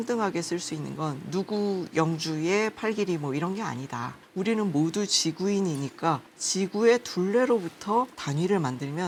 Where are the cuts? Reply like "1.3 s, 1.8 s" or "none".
none